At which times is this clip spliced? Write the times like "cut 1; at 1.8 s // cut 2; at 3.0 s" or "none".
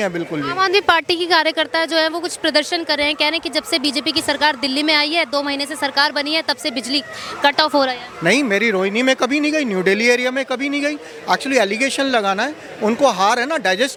none